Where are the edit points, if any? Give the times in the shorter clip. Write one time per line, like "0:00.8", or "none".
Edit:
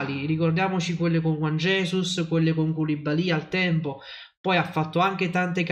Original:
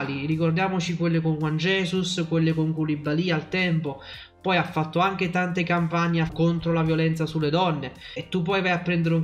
none